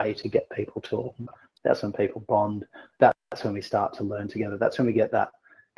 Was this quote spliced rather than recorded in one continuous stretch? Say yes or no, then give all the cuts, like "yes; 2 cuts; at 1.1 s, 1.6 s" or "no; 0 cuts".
yes; 1 cut; at 1.4 s